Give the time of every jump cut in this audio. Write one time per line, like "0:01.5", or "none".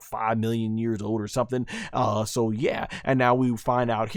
none